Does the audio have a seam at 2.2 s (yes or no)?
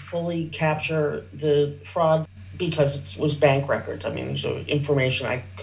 yes